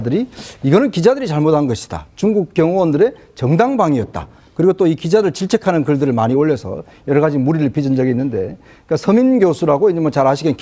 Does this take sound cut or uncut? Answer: cut